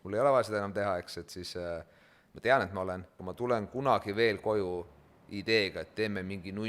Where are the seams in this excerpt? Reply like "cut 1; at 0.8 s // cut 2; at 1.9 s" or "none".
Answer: cut 1; at 3.1 s